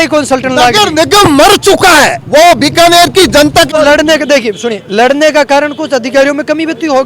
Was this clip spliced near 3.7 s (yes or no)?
yes